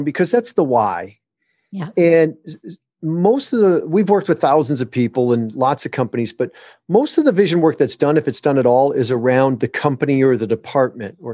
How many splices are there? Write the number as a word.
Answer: zero